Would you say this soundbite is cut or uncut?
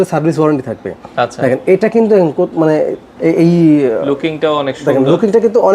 uncut